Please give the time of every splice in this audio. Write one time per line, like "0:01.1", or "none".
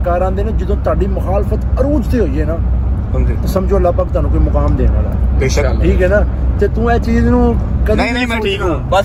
none